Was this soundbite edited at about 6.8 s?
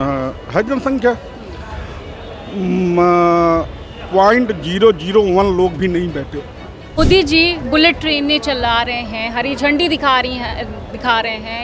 yes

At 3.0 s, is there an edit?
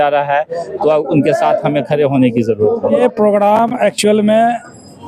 yes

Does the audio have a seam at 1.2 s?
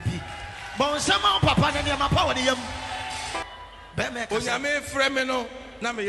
no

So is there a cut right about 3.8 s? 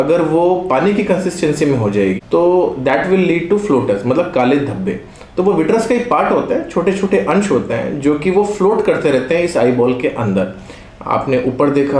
no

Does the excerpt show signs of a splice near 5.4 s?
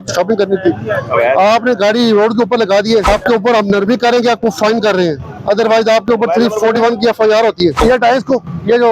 no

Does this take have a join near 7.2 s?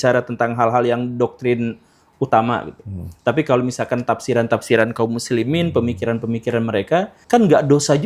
yes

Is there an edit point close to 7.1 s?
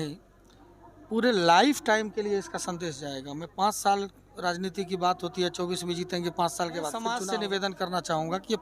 yes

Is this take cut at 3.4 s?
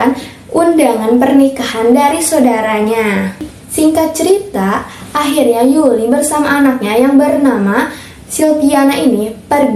yes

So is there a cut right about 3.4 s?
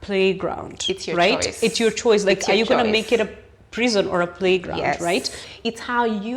no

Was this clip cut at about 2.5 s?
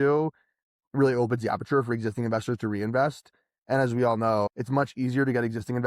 no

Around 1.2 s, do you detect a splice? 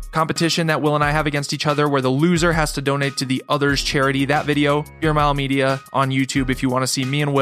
no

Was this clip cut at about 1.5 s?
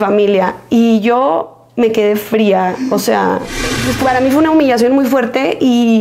no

